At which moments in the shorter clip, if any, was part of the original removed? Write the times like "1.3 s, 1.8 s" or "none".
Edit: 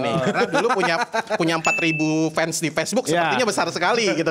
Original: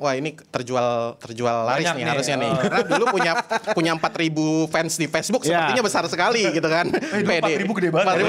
none